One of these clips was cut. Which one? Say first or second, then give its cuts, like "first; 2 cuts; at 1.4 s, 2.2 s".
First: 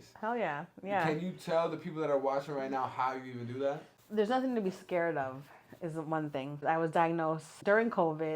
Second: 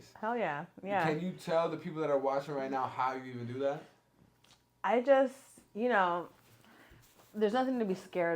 first; 2 cuts; at 3.9 s, 6.6 s